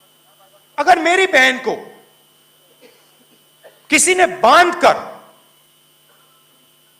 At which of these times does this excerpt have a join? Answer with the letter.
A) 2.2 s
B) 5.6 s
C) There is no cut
B